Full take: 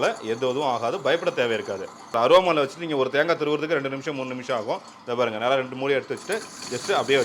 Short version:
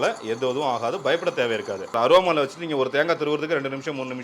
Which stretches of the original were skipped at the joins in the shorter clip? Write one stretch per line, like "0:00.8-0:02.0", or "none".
0:01.8-0:02.0